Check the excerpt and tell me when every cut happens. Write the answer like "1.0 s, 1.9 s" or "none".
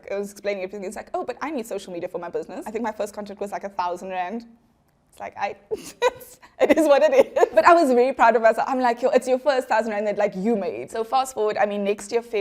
2.6 s, 7.5 s, 10.9 s